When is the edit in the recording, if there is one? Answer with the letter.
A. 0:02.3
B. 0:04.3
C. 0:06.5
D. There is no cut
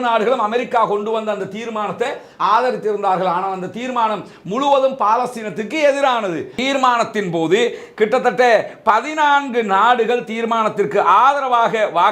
C